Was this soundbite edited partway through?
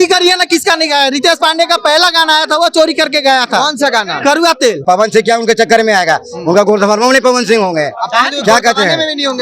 yes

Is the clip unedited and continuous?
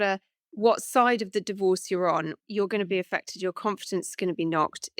no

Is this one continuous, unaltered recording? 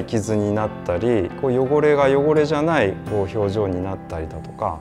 yes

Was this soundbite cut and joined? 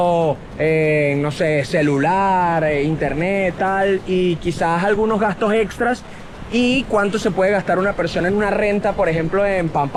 no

